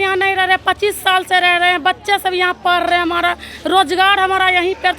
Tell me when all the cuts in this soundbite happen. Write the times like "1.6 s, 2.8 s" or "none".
none